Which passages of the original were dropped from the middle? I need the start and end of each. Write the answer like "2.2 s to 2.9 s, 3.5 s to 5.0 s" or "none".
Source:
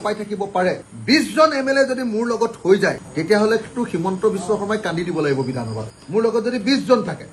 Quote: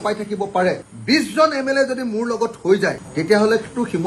none